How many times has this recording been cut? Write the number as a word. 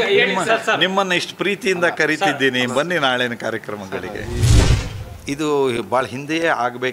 one